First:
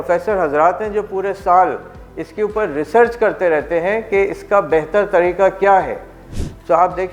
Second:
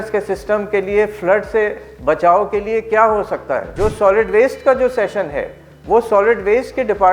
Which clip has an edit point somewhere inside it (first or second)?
second